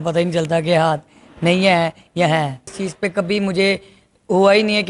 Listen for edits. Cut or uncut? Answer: cut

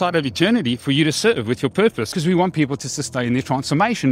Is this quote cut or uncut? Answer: cut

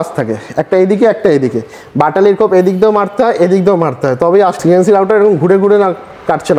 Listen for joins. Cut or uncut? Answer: cut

